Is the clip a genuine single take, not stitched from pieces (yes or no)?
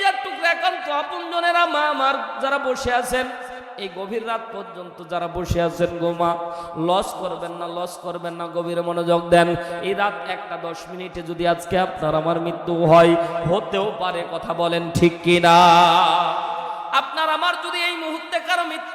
yes